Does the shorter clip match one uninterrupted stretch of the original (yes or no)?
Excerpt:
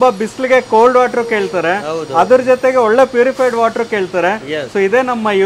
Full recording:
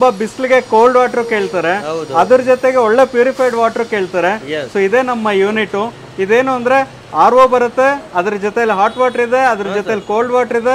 yes